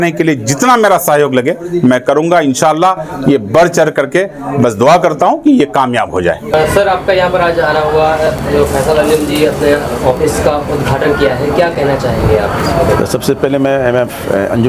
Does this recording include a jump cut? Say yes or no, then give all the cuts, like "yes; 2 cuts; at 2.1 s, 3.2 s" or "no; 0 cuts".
no; 0 cuts